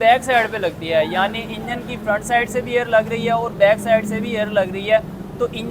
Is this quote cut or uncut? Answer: uncut